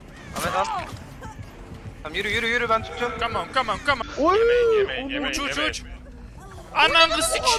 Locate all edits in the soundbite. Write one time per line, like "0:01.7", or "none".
0:04.0